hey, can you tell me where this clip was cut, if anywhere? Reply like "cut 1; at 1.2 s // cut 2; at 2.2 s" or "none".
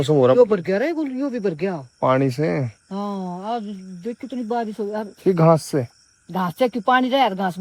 none